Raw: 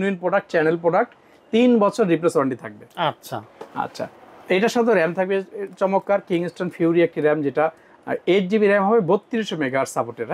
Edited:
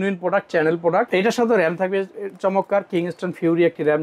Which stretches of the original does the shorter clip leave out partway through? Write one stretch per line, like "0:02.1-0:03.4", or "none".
0:01.1-0:04.5